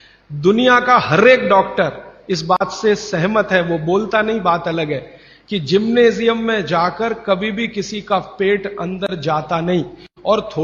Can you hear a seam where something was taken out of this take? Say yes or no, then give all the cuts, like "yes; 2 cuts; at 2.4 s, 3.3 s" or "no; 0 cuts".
no; 0 cuts